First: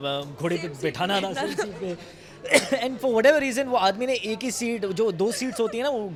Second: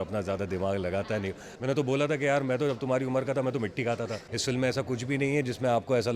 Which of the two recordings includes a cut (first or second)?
second